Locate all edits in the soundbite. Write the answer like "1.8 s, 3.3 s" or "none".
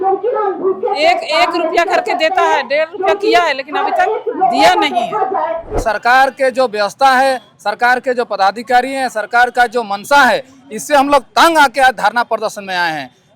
5.8 s